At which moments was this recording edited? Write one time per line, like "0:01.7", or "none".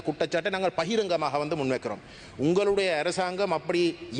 none